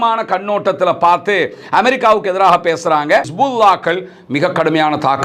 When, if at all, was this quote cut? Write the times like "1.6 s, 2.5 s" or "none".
3.3 s